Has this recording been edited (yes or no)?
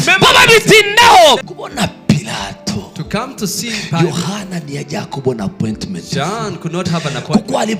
yes